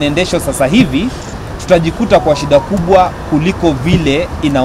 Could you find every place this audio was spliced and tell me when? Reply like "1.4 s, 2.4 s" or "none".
none